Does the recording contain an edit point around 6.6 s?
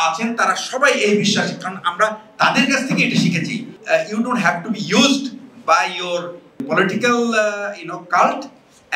yes; 2 cuts; at 3.7 s, 6.6 s

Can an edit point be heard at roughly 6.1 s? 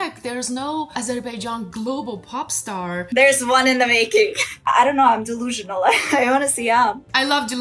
no; 2 cuts; at 3.0 s, 4.5 s

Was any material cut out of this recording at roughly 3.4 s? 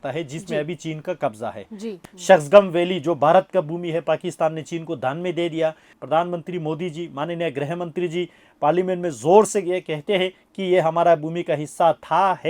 no; 2 cuts; at 2.0 s, 5.9 s

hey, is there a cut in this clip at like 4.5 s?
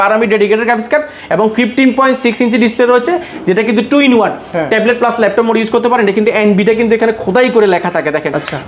no; 0 cuts

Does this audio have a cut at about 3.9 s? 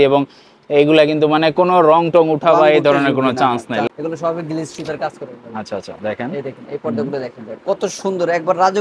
no; 0 cuts

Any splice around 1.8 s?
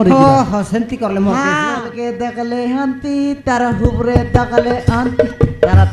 yes; 1 cut; at 1.8 s

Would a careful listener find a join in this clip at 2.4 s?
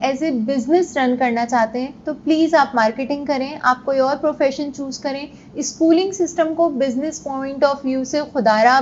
no; 0 cuts

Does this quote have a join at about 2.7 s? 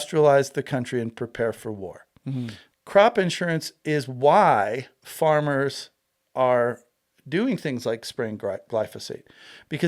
yes; 1 cut; at 2.7 s

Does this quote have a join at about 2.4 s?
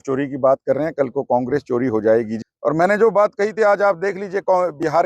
yes; 1 cut; at 2.4 s

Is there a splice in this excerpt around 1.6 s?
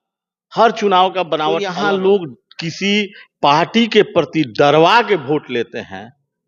yes; 1 cut; at 1.6 s

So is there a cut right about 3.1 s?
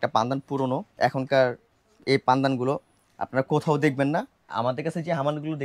no; 2 cuts; at 0.9 s, 4.5 s

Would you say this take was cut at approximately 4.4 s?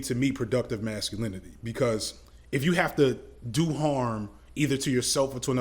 no; 1 cut; at 2.2 s

